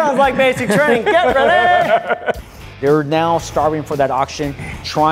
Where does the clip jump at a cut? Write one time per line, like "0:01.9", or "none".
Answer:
0:02.3